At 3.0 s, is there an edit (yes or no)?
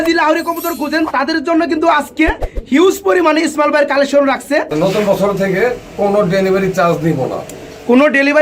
no